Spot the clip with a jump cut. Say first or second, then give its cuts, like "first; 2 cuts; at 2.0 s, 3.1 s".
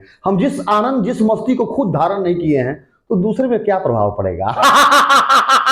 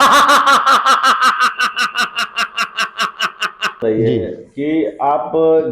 second; 1 cut; at 3.8 s